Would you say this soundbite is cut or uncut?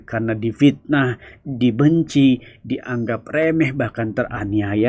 uncut